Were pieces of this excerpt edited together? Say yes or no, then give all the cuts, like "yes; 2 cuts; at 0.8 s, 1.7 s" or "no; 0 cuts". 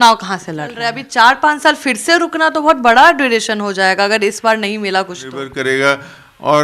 yes; 2 cuts; at 0.9 s, 5.5 s